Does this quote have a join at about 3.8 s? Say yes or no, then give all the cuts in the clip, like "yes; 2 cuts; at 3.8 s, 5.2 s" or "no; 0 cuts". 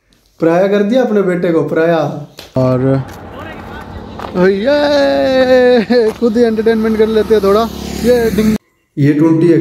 no; 2 cuts; at 2.6 s, 8.6 s